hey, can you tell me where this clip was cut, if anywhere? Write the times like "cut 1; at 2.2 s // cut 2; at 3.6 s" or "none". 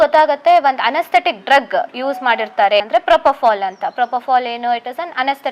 cut 1; at 2.8 s